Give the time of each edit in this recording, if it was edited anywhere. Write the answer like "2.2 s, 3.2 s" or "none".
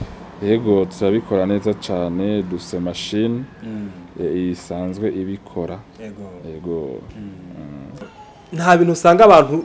8.1 s